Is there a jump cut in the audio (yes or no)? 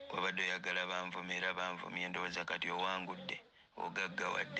no